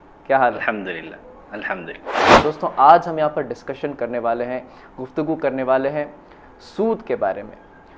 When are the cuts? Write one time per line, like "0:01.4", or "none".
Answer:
0:02.2